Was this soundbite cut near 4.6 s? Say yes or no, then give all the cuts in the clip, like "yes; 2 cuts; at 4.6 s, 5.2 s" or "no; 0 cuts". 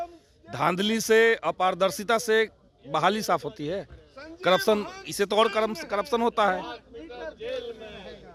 no; 0 cuts